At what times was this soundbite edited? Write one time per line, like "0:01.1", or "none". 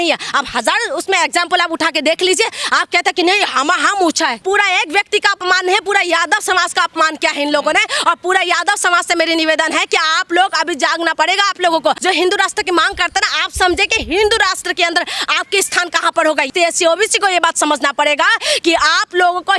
0:04.4
0:12.0
0:16.5